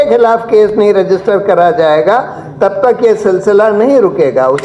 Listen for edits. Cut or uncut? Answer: uncut